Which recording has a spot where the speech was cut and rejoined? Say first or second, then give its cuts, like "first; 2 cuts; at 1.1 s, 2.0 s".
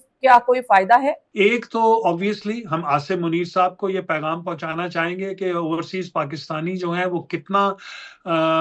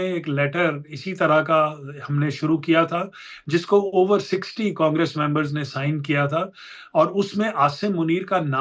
first; 1 cut; at 1.2 s